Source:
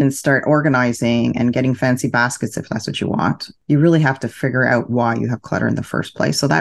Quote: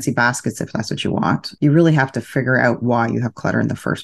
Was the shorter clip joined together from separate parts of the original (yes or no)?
yes